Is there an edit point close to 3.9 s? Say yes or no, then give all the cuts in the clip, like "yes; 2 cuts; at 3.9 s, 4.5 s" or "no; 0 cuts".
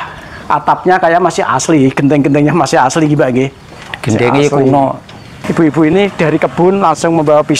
no; 1 cut; at 5.4 s